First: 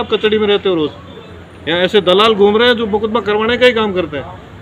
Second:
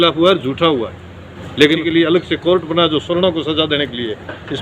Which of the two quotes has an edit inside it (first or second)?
second